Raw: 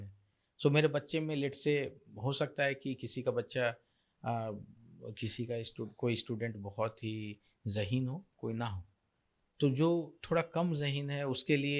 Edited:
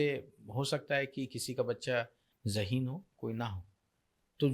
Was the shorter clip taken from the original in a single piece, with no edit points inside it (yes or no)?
no